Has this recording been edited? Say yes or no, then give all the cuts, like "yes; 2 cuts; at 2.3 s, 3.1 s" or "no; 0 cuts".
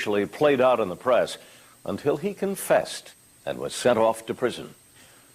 yes; 1 cut; at 2.9 s